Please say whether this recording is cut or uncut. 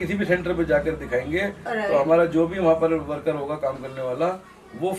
uncut